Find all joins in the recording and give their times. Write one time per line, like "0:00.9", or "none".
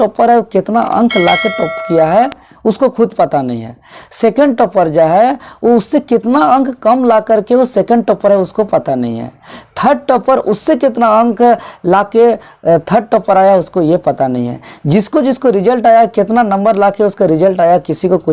none